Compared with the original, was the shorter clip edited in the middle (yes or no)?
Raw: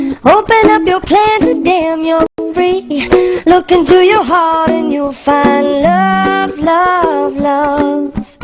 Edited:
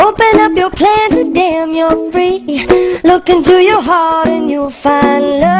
yes